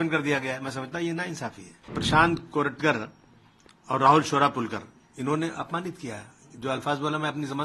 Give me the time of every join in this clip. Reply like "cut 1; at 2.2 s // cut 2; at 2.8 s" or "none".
cut 1; at 2.0 s